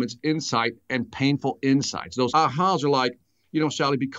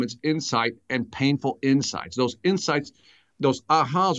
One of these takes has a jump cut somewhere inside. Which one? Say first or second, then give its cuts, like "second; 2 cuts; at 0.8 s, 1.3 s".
first; 1 cut; at 2.3 s